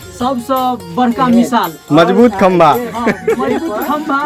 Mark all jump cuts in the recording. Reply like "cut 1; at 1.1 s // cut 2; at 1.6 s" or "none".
none